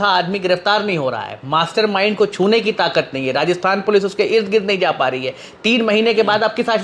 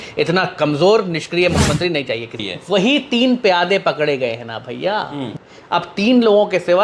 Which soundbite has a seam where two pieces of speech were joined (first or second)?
second